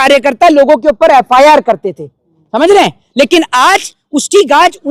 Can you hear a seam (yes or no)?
no